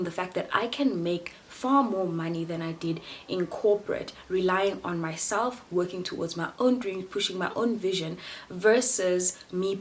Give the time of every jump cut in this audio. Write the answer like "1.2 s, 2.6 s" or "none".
none